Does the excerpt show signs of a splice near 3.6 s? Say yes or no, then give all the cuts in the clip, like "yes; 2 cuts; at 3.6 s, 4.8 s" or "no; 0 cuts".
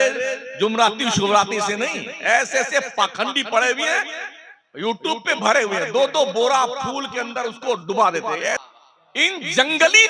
no; 1 cut; at 8.6 s